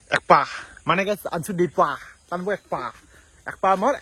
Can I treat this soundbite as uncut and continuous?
yes; 0 cuts

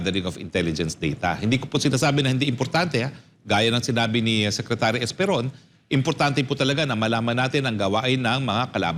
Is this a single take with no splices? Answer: yes; 0 cuts

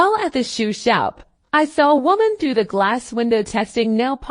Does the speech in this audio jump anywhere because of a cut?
yes; 1 cut; at 1.3 s

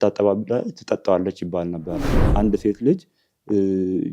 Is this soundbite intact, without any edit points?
no; 1 cut; at 2.2 s

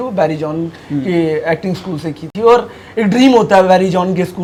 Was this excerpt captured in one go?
yes; 0 cuts

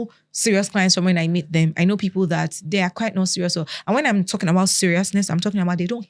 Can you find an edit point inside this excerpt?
no; 0 cuts

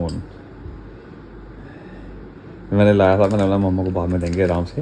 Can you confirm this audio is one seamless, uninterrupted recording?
yes; 0 cuts

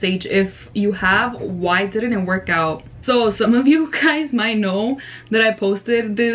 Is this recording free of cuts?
yes; 0 cuts

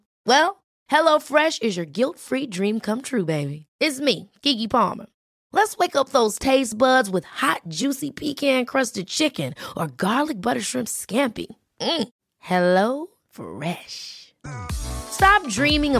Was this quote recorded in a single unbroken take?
yes; 0 cuts

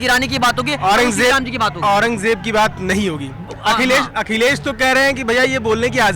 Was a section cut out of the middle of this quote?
no; 0 cuts

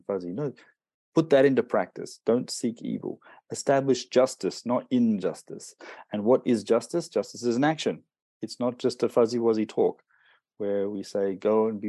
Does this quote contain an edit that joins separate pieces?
no; 0 cuts

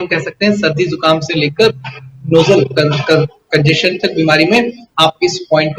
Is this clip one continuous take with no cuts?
yes; 0 cuts

